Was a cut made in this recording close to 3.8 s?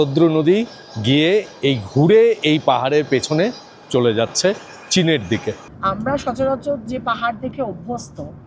no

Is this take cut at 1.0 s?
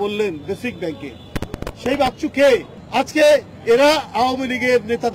no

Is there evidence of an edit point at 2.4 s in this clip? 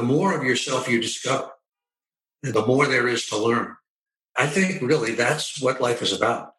yes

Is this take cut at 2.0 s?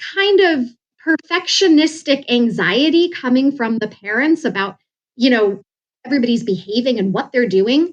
no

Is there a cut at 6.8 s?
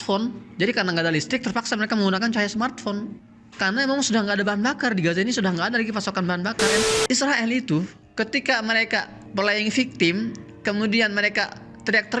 yes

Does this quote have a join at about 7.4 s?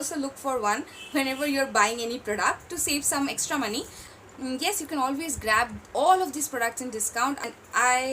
yes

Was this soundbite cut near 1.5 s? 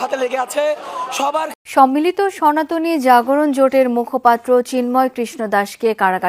yes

